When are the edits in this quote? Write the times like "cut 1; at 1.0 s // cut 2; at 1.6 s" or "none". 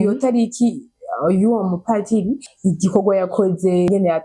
cut 1; at 2.5 s